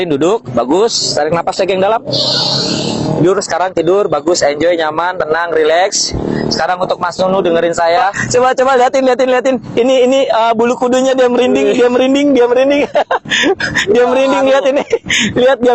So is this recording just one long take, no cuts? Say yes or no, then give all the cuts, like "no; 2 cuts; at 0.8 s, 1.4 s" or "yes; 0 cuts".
no; 2 cuts; at 8.2 s, 13.8 s